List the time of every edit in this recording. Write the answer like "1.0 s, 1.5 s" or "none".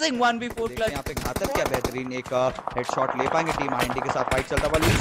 1.1 s